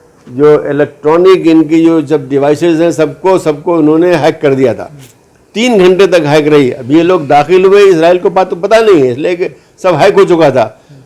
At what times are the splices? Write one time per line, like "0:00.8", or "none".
none